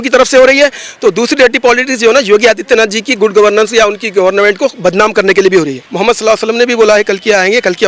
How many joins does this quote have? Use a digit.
1